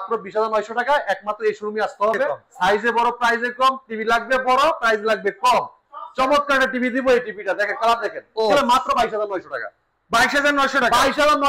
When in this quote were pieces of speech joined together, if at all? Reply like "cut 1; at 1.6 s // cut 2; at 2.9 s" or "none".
cut 1; at 2.4 s // cut 2; at 8.5 s